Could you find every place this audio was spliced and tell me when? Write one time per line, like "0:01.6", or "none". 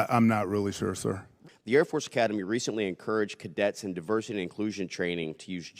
0:01.3

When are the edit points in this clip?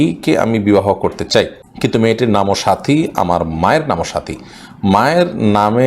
0:01.6

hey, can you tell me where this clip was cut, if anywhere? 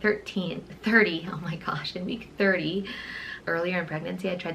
0:03.3

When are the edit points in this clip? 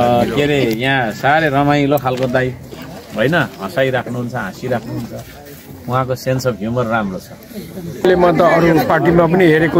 0:08.0

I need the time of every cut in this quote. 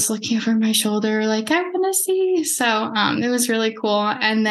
none

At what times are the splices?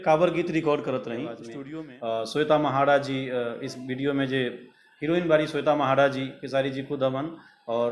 0:01.5

